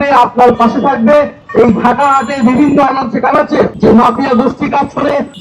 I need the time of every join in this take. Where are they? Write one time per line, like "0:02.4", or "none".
none